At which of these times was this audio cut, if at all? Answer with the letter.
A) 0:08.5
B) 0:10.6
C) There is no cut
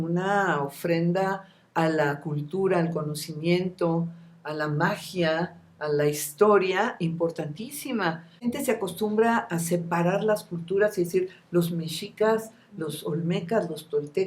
A